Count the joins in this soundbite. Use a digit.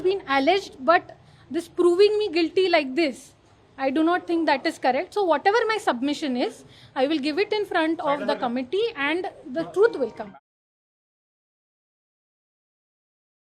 0